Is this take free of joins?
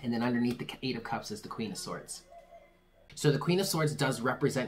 no; 1 cut; at 3.1 s

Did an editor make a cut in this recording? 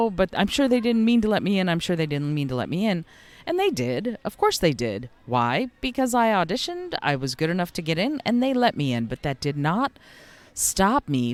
no; 0 cuts

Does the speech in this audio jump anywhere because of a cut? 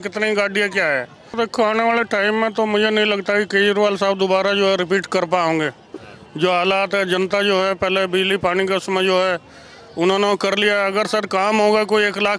yes; 1 cut; at 1.3 s

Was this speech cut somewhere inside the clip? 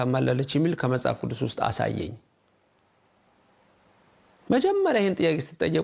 no; 0 cuts

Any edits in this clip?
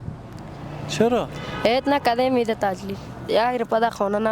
yes; 1 cut; at 3.1 s

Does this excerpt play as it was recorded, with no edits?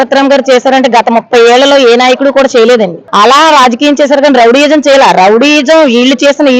no; 1 cut; at 3.0 s

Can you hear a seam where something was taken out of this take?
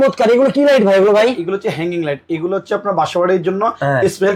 no; 0 cuts

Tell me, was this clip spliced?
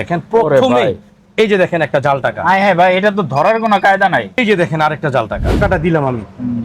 yes; 2 cuts; at 4.4 s, 5.6 s

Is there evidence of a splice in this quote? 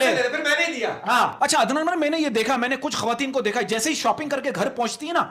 yes; 1 cut; at 1.3 s

